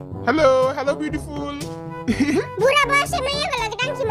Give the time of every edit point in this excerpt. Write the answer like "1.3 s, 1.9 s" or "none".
none